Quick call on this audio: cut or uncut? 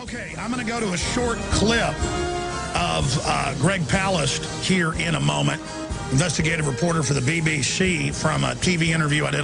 cut